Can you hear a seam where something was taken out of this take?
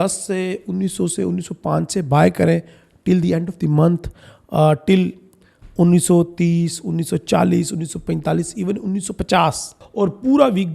yes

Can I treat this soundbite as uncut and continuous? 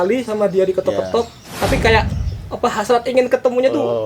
no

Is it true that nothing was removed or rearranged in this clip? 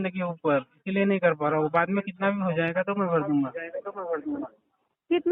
yes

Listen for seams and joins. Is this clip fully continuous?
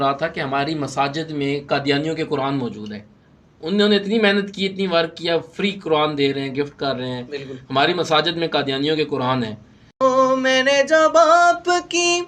no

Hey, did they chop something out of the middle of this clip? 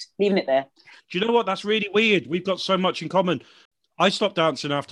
yes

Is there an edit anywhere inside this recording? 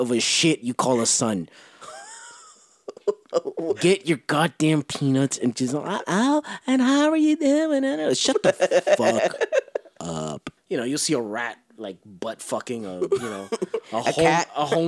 yes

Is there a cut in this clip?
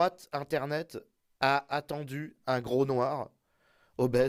no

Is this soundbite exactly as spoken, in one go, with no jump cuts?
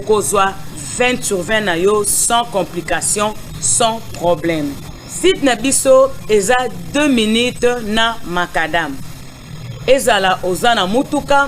no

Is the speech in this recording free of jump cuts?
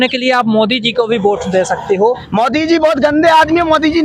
no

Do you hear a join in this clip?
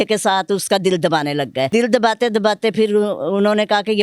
yes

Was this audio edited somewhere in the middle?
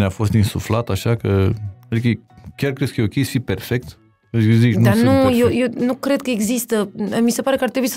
no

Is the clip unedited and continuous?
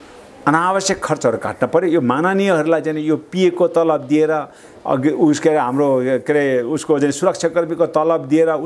yes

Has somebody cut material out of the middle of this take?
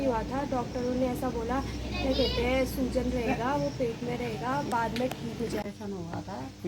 yes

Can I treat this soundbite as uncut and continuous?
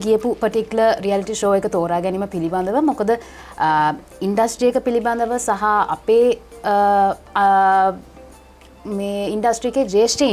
yes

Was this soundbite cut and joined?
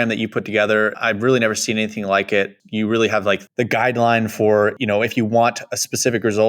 yes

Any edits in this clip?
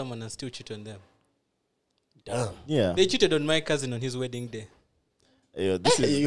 no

